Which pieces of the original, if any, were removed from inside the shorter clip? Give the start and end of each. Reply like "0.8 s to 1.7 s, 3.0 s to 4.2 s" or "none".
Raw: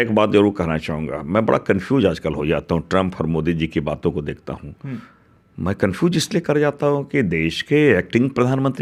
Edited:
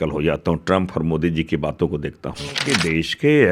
4.8 s to 7.1 s